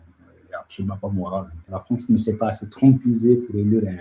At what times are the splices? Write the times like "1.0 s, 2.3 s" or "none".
1.7 s

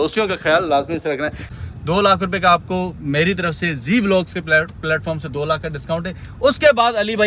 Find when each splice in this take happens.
1.5 s

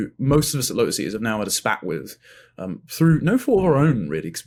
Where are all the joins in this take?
none

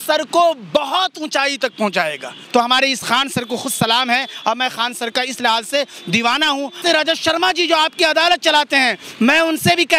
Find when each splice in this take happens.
2.4 s, 6.8 s

